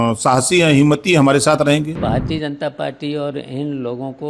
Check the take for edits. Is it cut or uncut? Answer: cut